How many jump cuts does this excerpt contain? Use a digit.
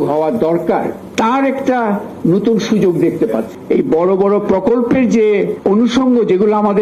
3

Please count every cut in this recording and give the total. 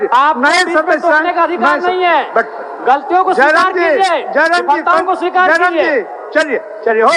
0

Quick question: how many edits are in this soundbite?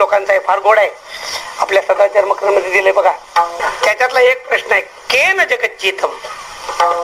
1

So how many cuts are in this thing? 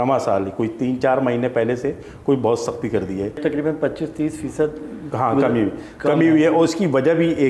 1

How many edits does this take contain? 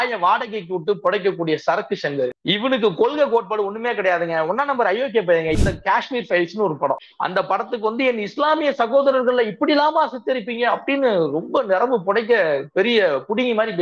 3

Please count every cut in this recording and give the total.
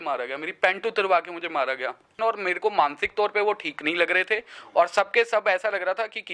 1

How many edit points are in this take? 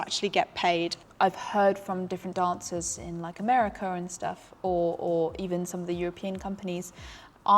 1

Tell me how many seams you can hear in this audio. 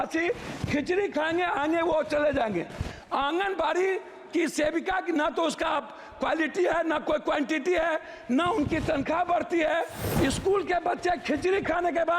1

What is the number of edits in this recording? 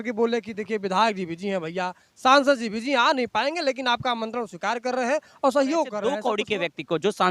1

